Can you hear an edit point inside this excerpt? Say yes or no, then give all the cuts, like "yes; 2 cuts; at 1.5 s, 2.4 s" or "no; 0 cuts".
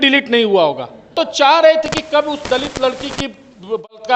yes; 1 cut; at 1.2 s